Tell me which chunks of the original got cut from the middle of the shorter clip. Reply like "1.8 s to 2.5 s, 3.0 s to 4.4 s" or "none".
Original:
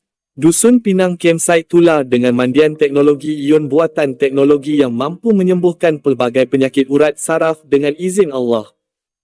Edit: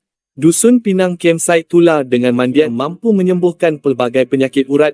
2.7 s to 4.9 s